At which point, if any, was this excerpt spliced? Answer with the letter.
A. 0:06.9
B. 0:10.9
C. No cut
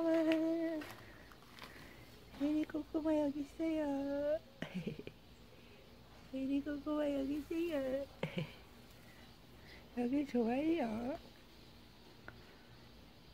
C